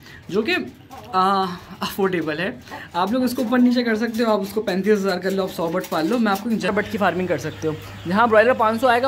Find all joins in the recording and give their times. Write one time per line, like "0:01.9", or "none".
0:06.7